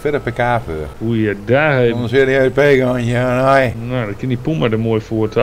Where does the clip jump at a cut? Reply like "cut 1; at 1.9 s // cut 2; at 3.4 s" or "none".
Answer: cut 1; at 0.9 s // cut 2; at 3.8 s